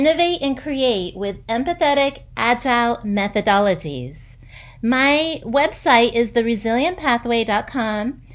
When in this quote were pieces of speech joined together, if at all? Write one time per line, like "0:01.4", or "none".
none